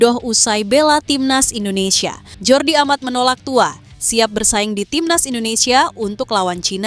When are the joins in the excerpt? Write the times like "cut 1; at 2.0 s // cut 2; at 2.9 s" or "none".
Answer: cut 1; at 2.3 s